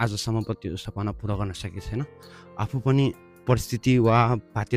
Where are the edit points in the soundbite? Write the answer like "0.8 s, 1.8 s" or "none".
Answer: none